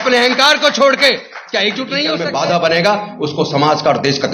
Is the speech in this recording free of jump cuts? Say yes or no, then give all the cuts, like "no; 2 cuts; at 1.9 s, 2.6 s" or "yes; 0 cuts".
no; 1 cut; at 2.1 s